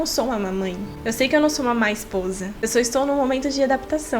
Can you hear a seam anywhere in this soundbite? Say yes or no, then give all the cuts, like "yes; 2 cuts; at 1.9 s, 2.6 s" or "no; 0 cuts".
yes; 2 cuts; at 0.9 s, 2.5 s